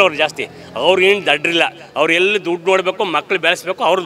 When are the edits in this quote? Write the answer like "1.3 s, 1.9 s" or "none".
none